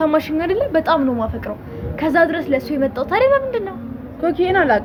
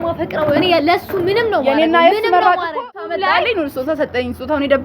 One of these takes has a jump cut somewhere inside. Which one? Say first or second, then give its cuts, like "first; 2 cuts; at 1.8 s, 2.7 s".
second; 1 cut; at 2.8 s